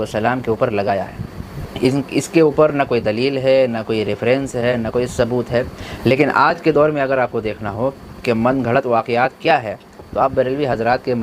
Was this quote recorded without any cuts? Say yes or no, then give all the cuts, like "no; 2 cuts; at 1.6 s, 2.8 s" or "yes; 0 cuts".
no; 1 cut; at 5.8 s